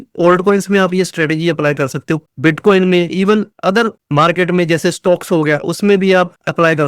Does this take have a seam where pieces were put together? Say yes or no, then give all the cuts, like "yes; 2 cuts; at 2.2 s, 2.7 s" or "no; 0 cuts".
yes; 1 cut; at 2.3 s